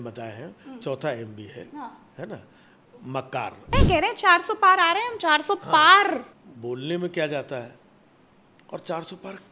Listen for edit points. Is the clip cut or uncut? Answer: cut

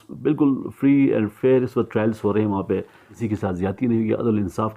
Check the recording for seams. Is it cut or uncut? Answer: cut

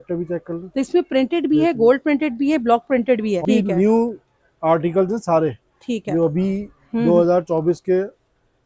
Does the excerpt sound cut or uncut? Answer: cut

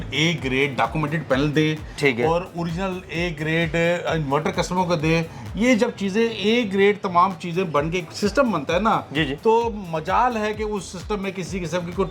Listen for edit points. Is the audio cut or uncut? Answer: uncut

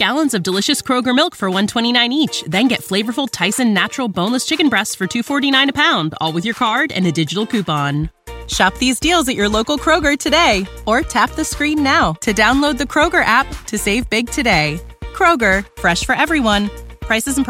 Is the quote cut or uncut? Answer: uncut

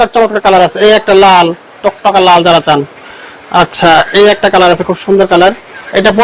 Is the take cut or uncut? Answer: uncut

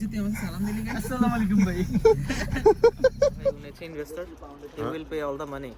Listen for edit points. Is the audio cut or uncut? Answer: cut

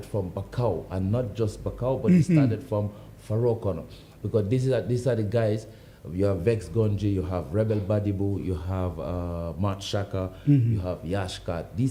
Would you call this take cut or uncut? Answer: uncut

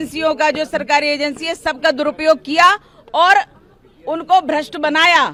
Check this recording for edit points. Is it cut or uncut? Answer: uncut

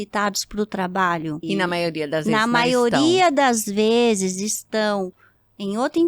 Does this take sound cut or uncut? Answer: cut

